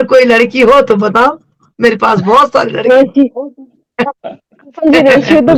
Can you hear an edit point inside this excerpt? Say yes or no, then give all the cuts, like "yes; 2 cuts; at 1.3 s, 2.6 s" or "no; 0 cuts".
no; 0 cuts